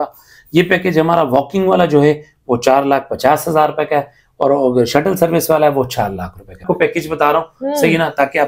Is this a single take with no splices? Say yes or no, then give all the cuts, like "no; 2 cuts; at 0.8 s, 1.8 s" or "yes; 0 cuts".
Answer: no; 1 cut; at 6.6 s